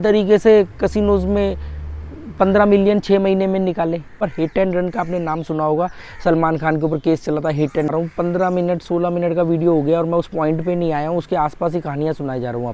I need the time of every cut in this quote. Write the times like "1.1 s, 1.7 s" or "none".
4.2 s, 7.9 s